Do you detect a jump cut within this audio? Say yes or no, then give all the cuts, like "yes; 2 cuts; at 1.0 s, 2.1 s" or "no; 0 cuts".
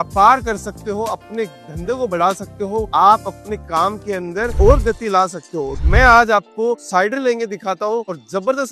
yes; 1 cut; at 5.8 s